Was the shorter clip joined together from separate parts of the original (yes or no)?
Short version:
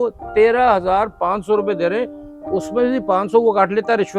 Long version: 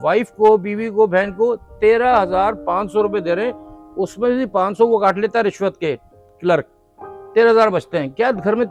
no